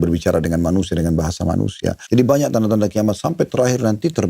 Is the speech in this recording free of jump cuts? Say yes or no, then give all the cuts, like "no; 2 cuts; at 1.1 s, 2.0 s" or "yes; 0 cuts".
no; 1 cut; at 2.0 s